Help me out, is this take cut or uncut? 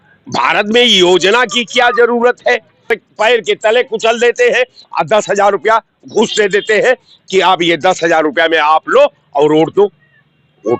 cut